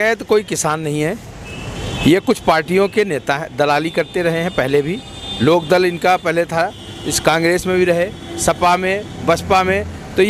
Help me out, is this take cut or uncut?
uncut